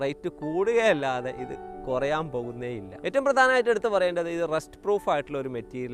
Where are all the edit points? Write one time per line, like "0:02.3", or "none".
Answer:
0:02.9